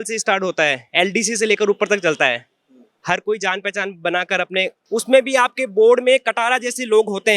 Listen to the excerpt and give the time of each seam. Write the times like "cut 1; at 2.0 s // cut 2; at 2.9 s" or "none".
cut 1; at 4.8 s